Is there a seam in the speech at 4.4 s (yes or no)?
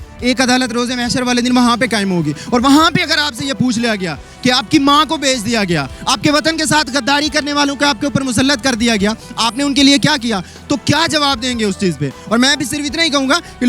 no